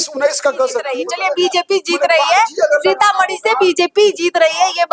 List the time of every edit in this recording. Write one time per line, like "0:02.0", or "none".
0:01.0